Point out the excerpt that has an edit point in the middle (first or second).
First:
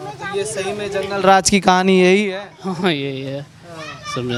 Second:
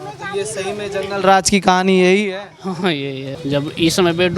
second